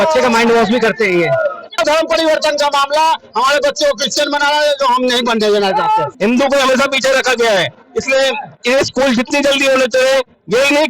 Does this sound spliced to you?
yes; 2 cuts; at 1.8 s, 6.1 s

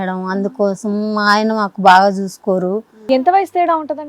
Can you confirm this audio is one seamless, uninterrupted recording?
no; 1 cut; at 3.0 s

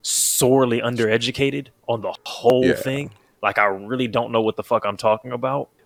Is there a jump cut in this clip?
no; 0 cuts

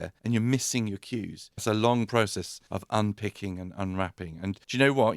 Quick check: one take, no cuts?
no; 1 cut; at 1.6 s

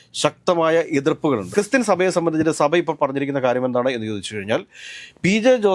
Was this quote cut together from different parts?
yes; 1 cut; at 1.5 s

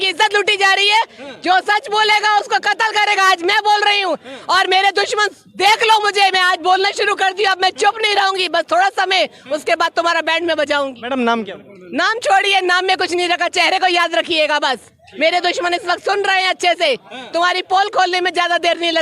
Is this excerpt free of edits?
yes; 0 cuts

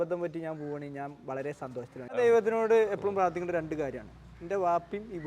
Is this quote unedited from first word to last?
no; 1 cut; at 2.1 s

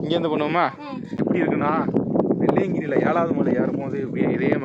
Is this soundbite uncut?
no; 1 cut; at 1.2 s

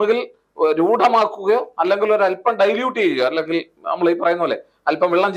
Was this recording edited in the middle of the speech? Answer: no; 0 cuts

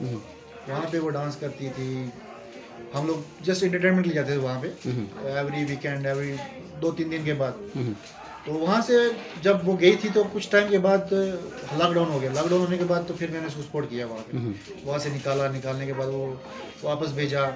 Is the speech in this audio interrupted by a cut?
no; 0 cuts

